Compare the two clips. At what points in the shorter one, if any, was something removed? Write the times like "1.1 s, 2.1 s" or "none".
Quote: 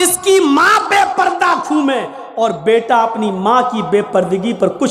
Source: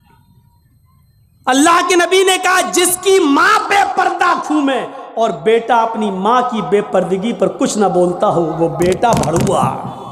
none